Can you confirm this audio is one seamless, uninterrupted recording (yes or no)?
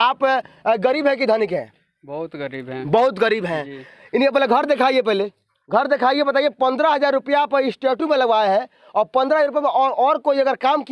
yes